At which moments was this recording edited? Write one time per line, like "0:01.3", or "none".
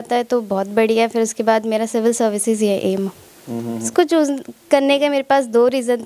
0:03.8